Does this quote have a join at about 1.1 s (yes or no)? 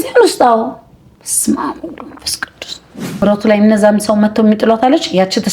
no